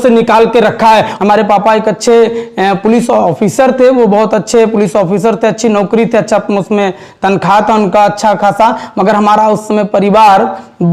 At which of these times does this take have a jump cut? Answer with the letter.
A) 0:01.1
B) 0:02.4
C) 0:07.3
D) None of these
A